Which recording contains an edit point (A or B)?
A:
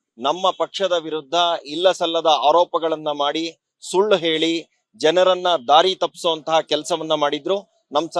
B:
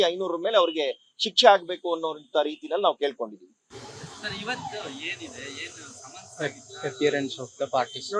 B